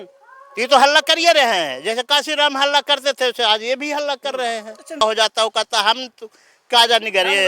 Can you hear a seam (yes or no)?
yes